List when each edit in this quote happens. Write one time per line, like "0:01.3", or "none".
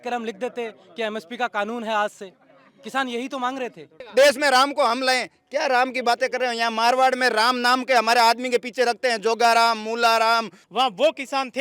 0:04.0
0:10.6